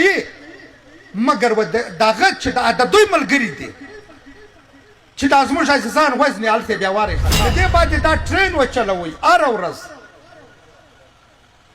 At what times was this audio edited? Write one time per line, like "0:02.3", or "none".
0:07.3